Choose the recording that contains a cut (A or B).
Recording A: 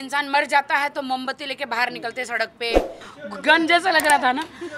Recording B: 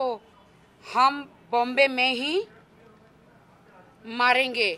A